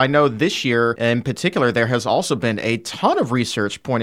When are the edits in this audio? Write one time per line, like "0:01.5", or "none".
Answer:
0:01.0